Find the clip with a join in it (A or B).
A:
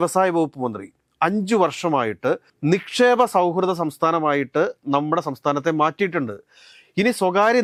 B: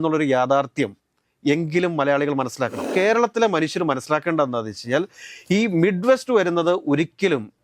B